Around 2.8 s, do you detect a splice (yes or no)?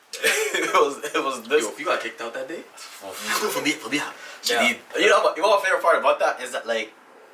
no